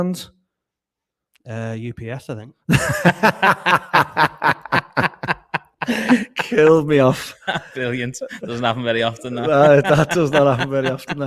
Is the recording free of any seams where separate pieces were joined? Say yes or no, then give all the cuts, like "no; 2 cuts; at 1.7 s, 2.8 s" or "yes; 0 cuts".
yes; 0 cuts